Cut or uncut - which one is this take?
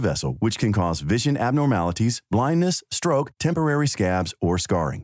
uncut